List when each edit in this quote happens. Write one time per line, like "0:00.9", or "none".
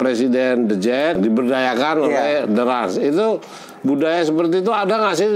0:01.2